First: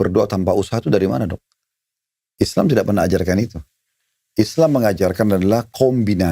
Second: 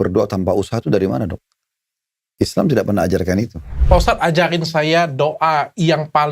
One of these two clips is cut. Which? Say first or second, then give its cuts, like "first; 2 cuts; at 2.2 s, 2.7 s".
second; 1 cut; at 3.7 s